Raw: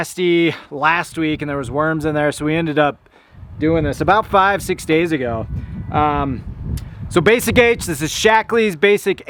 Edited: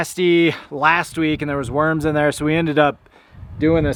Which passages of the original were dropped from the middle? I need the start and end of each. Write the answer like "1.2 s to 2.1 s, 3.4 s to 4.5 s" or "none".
none